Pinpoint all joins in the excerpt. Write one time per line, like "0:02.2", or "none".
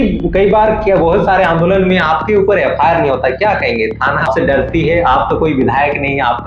0:04.3